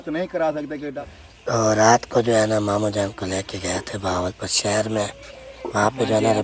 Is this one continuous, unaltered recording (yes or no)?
no